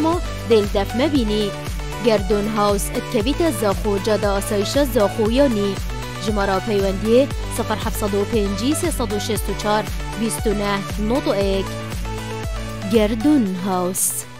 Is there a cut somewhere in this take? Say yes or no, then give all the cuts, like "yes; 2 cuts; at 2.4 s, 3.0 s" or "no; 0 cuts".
no; 0 cuts